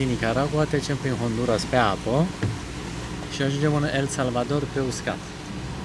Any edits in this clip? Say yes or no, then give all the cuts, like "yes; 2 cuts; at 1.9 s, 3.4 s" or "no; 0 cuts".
no; 0 cuts